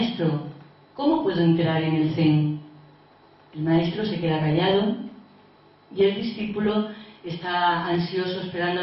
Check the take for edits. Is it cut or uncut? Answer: cut